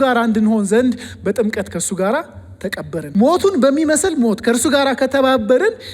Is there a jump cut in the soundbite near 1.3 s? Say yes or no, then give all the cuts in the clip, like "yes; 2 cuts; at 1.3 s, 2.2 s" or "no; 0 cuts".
no; 1 cut; at 3.1 s